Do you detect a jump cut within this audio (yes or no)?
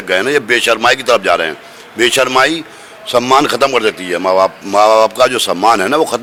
no